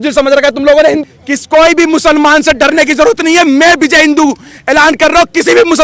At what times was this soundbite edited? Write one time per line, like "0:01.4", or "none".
0:01.0